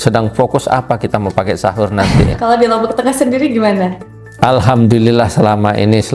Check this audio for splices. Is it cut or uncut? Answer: cut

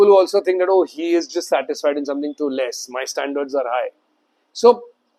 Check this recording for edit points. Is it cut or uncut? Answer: uncut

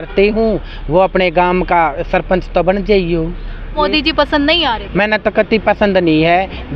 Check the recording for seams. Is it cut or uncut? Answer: uncut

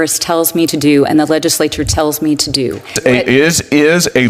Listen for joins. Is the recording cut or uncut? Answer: cut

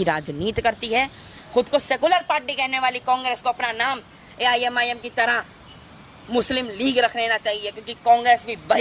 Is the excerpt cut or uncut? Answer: cut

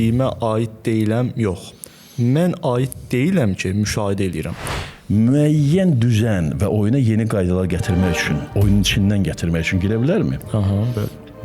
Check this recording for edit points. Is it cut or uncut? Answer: cut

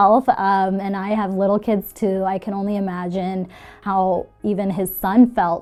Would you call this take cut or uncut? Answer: uncut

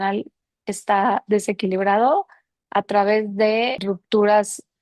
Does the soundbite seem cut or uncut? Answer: cut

